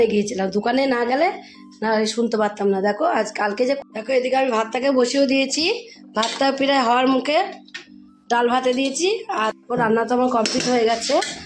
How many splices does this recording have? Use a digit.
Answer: 2